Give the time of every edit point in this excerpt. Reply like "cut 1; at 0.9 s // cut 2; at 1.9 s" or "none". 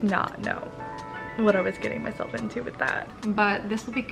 cut 1; at 3.1 s